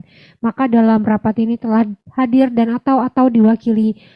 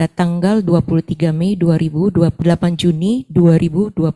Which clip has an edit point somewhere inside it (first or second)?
second